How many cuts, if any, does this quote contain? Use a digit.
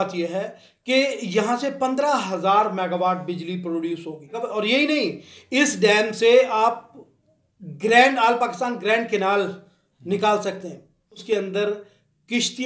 2